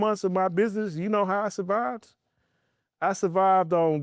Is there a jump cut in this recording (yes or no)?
no